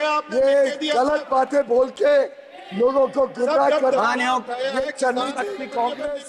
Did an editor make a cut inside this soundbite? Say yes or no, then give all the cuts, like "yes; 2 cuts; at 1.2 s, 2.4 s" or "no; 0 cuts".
no; 0 cuts